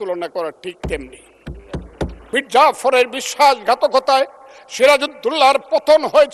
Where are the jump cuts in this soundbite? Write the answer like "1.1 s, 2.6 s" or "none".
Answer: 2.2 s